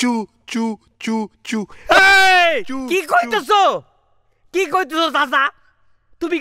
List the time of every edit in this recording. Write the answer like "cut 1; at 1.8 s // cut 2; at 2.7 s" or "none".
none